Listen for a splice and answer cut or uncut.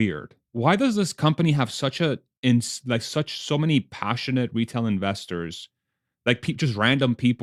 uncut